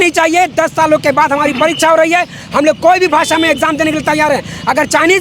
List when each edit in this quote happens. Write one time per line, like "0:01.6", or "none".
none